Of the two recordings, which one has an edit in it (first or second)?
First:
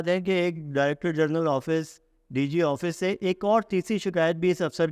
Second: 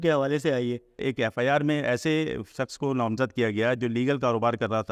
second